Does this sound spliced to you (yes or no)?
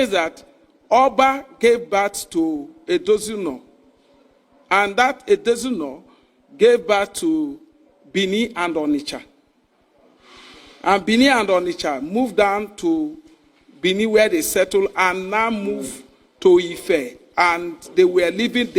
no